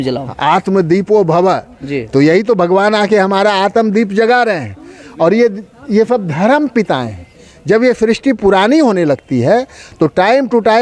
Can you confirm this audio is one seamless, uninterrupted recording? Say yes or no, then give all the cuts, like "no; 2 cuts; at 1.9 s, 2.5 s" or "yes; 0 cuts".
yes; 0 cuts